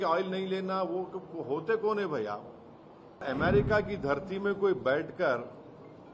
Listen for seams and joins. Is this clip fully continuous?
no; 1 cut; at 3.2 s

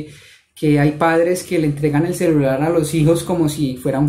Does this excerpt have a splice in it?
no; 0 cuts

